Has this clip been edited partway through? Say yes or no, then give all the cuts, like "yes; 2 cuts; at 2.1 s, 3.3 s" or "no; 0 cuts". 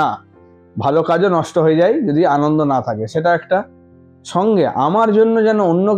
no; 0 cuts